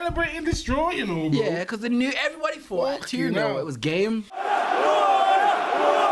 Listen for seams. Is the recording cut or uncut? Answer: cut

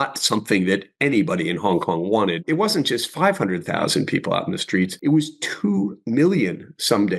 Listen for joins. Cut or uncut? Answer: cut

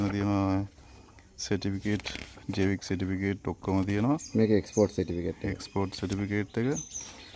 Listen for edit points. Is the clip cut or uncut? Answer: uncut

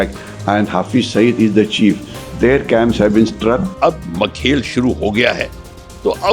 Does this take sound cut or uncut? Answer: cut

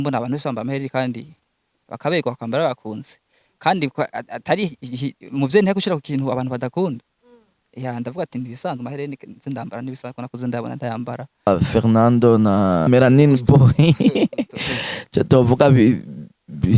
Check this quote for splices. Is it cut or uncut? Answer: cut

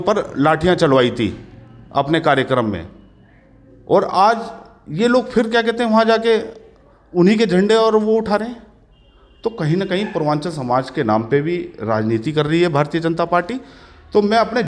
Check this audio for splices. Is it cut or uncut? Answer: uncut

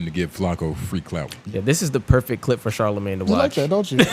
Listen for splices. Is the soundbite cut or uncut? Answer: cut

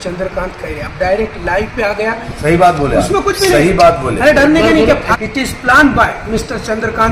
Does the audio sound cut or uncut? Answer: cut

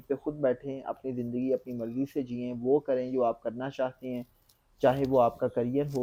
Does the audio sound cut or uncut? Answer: uncut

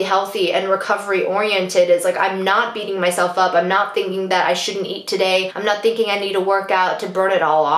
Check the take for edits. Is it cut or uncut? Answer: uncut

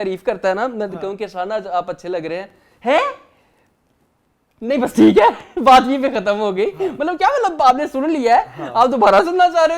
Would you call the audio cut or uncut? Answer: uncut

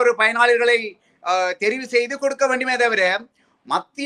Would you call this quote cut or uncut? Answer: uncut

